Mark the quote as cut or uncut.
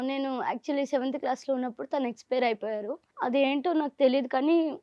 cut